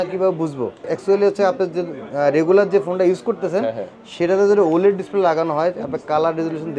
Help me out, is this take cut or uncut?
cut